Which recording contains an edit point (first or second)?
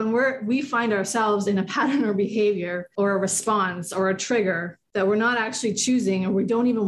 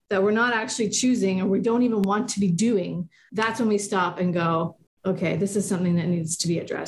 first